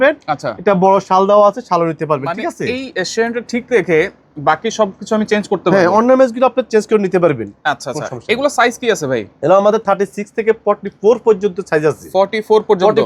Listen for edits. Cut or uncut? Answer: uncut